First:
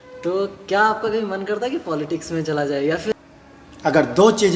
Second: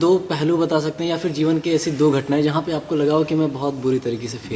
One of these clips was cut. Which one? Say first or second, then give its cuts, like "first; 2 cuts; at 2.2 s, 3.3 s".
first; 1 cut; at 3.1 s